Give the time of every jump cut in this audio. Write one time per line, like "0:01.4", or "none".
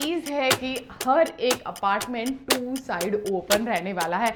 none